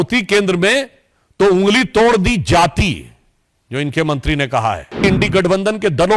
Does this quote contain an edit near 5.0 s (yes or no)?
yes